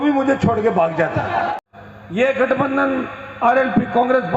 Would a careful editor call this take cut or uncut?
cut